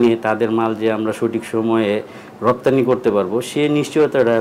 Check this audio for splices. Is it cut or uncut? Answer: uncut